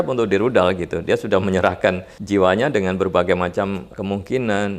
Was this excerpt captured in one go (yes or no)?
no